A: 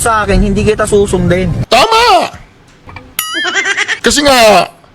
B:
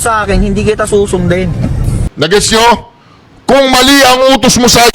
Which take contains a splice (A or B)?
B